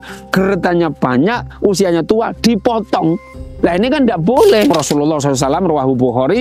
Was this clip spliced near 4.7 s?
yes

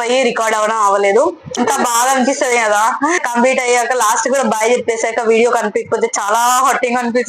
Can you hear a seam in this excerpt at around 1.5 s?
yes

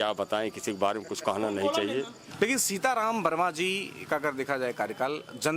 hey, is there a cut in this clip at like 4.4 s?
no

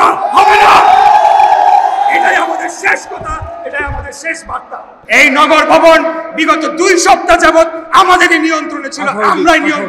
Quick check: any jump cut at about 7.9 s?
no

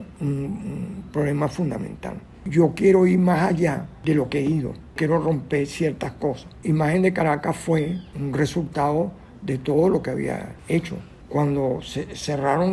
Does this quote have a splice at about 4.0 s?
no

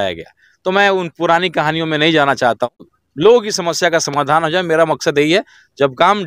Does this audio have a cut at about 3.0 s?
yes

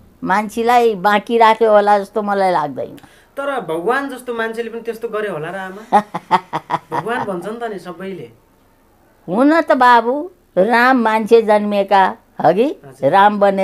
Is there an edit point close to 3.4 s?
no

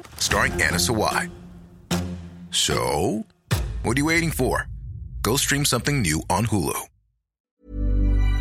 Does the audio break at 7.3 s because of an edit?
yes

